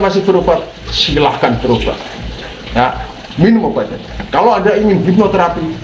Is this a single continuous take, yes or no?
yes